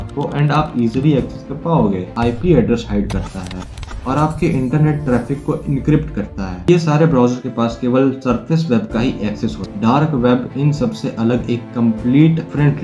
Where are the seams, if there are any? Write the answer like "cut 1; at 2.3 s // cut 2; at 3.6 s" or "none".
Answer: cut 1; at 2.1 s // cut 2; at 6.7 s // cut 3; at 9.7 s

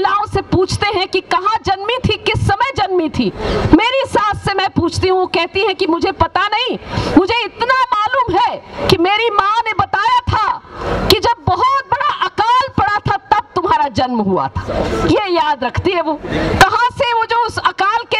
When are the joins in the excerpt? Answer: none

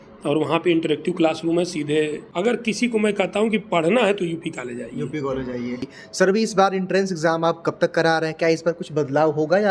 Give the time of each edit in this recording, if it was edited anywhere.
cut 1; at 2.2 s // cut 2; at 6.0 s

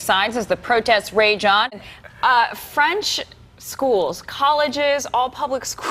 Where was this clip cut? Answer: cut 1; at 1.8 s

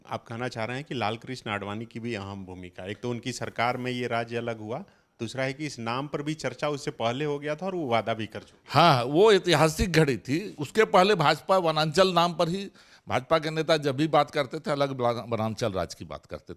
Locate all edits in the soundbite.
none

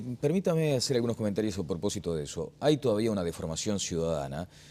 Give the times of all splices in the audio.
none

